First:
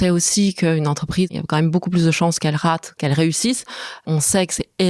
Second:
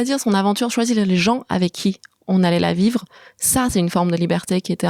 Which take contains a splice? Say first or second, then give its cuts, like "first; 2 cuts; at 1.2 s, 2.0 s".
first; 3 cuts; at 1.4 s, 3.0 s, 4.0 s